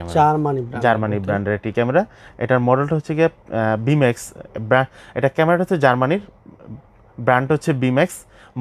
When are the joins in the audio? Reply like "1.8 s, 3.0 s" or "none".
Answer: none